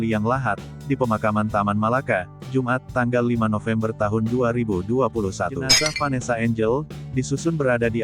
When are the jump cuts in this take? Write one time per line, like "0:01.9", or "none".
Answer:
0:05.7